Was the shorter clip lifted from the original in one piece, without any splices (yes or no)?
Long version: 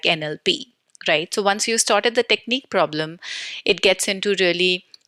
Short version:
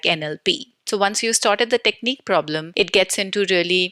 no